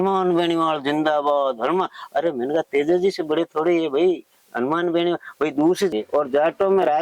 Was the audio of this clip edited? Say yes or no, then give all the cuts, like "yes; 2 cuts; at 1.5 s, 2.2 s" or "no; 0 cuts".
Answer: yes; 1 cut; at 5.9 s